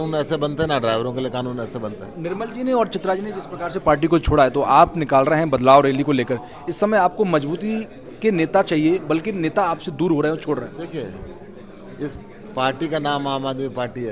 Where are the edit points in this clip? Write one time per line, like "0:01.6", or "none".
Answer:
none